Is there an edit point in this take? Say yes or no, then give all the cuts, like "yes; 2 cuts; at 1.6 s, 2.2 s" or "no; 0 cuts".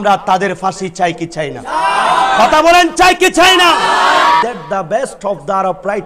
yes; 1 cut; at 4.4 s